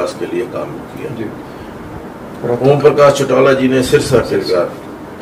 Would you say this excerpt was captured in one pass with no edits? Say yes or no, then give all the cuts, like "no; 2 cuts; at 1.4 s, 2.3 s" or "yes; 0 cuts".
yes; 0 cuts